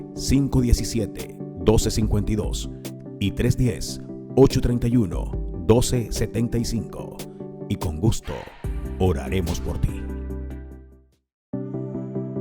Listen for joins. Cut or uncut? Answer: cut